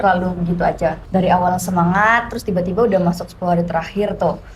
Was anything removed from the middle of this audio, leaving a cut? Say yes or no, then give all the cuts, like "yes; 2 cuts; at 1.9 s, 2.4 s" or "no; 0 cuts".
yes; 1 cut; at 1.0 s